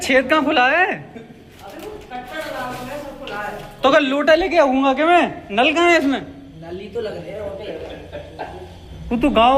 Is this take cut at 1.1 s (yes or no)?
no